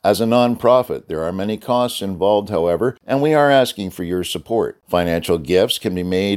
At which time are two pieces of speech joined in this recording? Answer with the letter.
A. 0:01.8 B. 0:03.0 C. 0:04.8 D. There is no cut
B